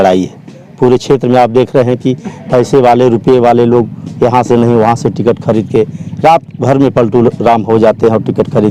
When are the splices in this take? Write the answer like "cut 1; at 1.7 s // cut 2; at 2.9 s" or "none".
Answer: none